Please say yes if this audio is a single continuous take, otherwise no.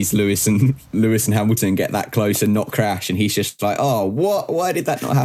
yes